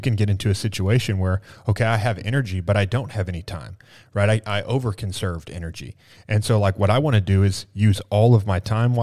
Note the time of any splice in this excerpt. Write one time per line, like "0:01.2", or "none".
none